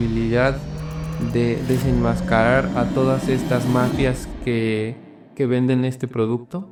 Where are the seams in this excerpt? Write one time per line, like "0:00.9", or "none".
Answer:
none